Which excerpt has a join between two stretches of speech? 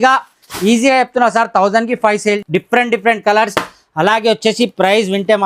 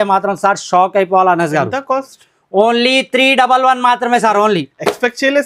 first; 1 cut; at 2.4 s

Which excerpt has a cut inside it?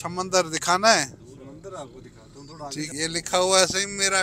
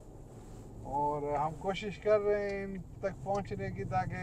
first; 1 cut; at 2.9 s

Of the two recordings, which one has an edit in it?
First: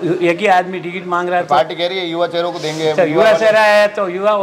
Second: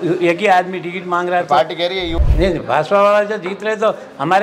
second; 1 cut; at 2.1 s

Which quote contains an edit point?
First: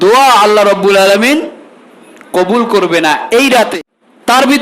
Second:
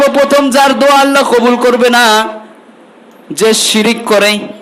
first; 1 cut; at 3.7 s

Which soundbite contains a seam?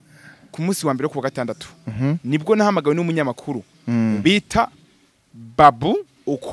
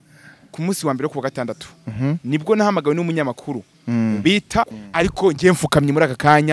second; 1 cut; at 4.8 s

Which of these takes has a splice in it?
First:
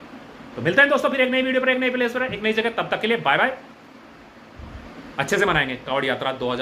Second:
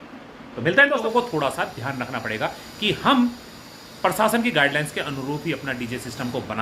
second; 1 cut; at 1.0 s

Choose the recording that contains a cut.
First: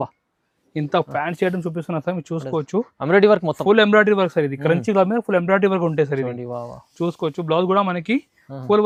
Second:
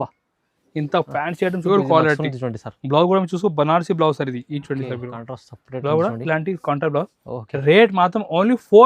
second; 1 cut; at 1.7 s

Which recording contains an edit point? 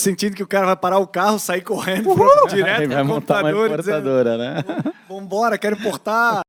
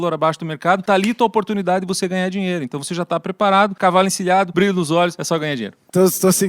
second; 4 cuts; at 0.8 s, 3.8 s, 4.5 s, 5.3 s

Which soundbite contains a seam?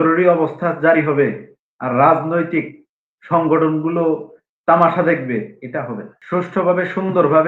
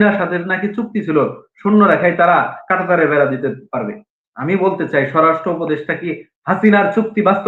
first; 1 cut; at 6.1 s

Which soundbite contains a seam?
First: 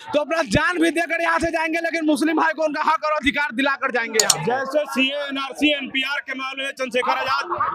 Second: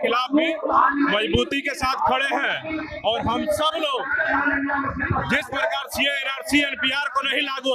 first; 1 cut; at 4.4 s

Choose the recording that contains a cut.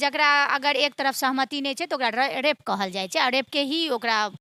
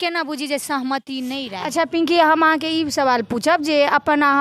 second; 1 cut; at 1.5 s

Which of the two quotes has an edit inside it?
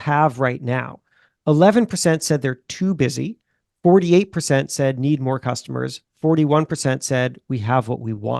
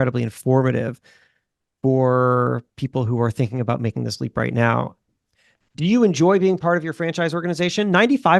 second; 1 cut; at 5.1 s

